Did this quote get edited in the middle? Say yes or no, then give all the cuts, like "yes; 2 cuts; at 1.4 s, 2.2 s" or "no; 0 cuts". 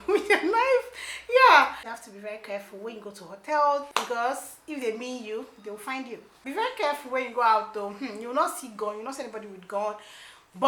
yes; 3 cuts; at 1.8 s, 3.9 s, 6.4 s